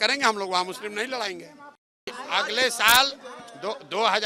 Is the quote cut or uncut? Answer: cut